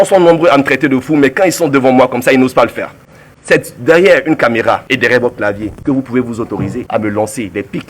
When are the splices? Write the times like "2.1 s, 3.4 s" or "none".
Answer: 4.8 s, 5.7 s, 6.8 s